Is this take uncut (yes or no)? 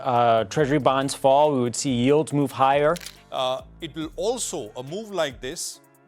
no